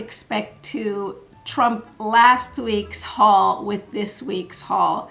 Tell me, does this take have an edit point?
no; 0 cuts

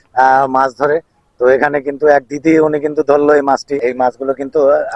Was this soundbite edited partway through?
yes; 1 cut; at 3.8 s

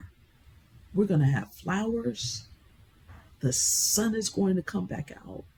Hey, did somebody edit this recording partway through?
no; 0 cuts

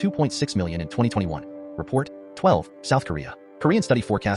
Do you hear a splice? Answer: yes; 1 cut; at 2.2 s

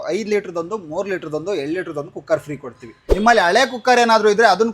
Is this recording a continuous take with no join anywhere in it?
no; 1 cut; at 3.0 s

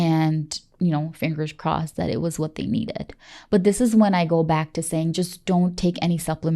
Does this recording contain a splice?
no; 0 cuts

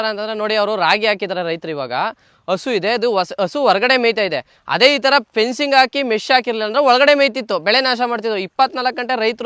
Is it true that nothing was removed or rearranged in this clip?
yes; 0 cuts

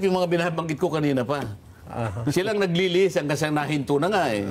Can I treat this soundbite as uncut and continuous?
yes; 0 cuts

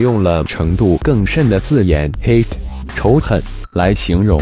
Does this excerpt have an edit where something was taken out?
no; 0 cuts

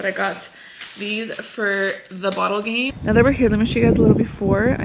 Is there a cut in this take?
yes; 1 cut; at 2.9 s

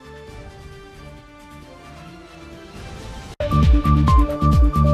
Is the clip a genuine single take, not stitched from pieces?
no; 1 cut; at 3.4 s

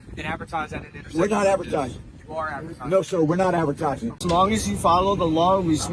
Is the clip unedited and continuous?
no; 1 cut; at 4.2 s

